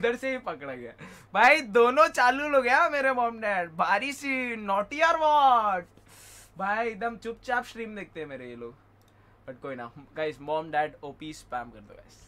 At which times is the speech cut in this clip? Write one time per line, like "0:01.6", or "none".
none